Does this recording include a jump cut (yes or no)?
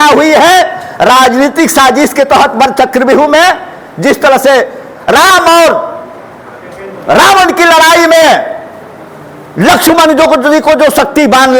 no